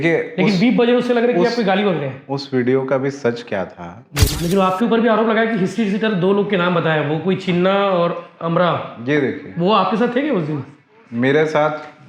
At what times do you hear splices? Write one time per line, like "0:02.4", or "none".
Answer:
0:04.4